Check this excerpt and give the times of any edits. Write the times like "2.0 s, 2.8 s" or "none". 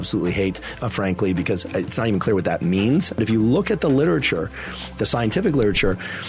3.1 s